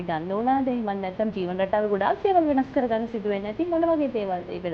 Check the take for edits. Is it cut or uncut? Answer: uncut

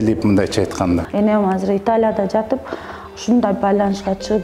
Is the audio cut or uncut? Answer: cut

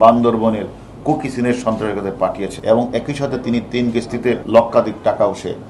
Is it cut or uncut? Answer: cut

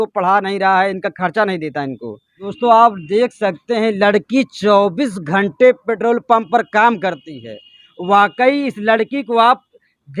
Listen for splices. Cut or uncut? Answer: cut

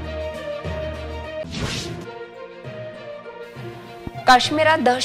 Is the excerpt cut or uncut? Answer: cut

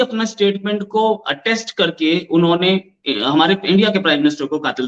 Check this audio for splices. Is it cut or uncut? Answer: uncut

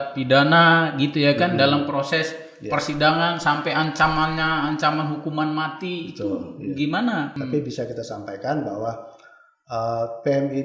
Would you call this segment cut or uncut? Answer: cut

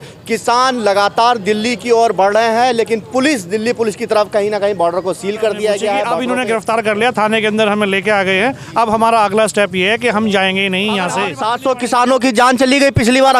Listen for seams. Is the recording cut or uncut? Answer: cut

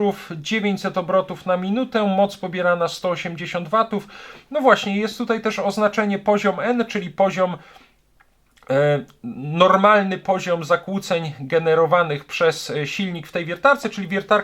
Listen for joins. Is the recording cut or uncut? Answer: uncut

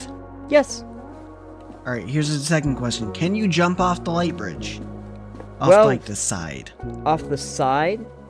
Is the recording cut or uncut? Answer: uncut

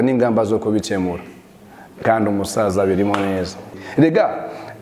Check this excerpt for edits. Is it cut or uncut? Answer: cut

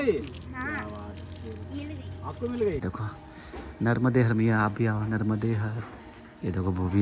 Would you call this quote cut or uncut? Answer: cut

